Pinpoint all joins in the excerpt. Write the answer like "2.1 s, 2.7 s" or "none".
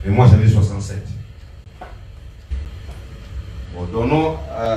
2.5 s